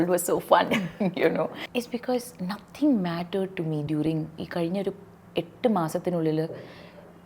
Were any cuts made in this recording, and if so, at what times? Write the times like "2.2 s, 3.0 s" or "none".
1.6 s